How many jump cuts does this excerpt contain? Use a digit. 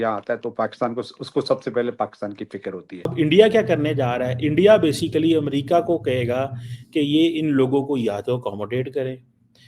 1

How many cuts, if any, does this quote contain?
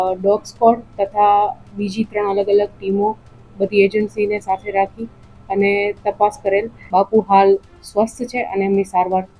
1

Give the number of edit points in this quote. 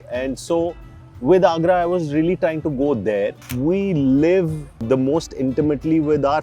2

